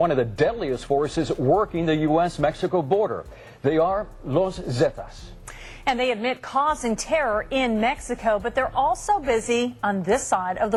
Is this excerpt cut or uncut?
uncut